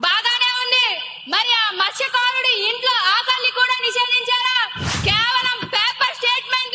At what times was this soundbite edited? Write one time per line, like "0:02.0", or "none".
0:04.8